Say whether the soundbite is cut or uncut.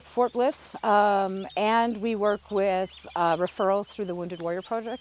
uncut